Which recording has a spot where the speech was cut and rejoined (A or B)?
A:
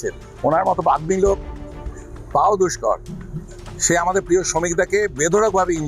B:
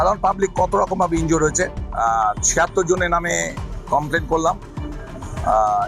B